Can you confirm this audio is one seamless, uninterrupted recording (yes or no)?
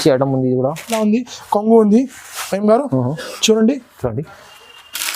no